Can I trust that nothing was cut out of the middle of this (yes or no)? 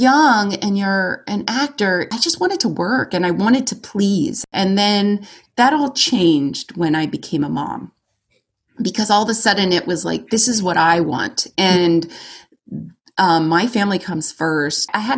no